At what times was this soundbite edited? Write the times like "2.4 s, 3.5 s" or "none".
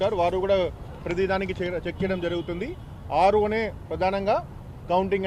none